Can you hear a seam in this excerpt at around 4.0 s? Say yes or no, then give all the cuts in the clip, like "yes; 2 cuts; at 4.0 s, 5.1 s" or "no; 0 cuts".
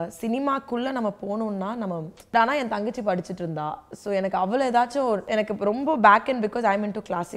no; 2 cuts; at 2.3 s, 5.2 s